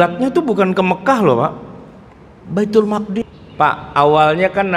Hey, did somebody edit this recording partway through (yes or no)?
yes